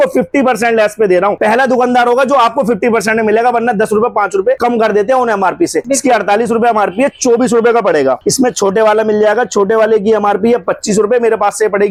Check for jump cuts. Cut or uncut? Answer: uncut